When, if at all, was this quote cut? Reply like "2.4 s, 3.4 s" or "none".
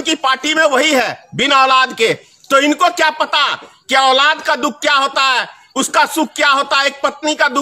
none